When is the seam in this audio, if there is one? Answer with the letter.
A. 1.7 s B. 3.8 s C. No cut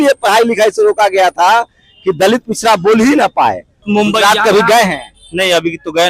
B